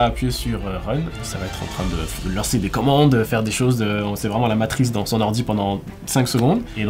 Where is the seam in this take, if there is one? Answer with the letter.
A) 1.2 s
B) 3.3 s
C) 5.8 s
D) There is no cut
A